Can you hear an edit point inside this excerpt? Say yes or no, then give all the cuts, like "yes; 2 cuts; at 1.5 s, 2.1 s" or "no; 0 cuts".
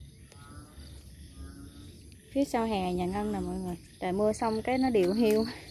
yes; 2 cuts; at 1.0 s, 3.8 s